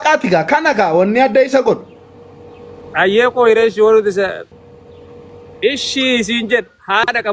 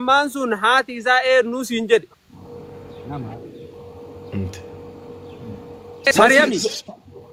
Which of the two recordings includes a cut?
first; 1 cut; at 4.4 s

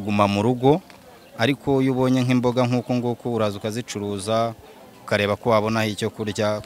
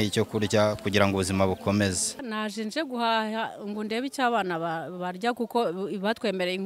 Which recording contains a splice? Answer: second; 1 cut; at 2.2 s

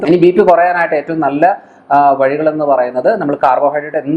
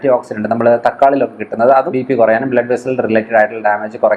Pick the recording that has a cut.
second; 1 cut; at 1.9 s

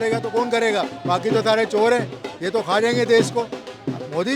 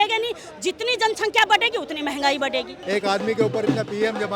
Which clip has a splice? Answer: second; 1 cut; at 2.8 s

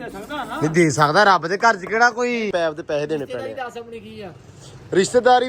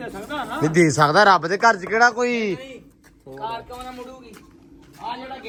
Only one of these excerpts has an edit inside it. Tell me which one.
first; 1 cut; at 2.5 s

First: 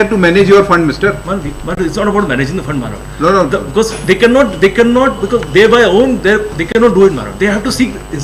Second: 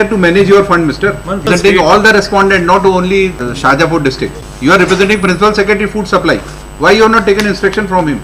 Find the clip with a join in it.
second; 3 cuts; at 1.5 s, 3.5 s, 4.4 s

